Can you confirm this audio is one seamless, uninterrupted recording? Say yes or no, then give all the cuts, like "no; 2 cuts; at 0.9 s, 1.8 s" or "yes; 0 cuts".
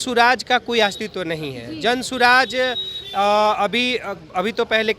yes; 0 cuts